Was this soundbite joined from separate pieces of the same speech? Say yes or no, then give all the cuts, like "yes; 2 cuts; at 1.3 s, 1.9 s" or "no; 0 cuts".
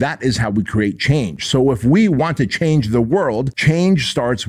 yes; 1 cut; at 3.5 s